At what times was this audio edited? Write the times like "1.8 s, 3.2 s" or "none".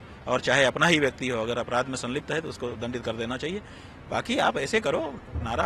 none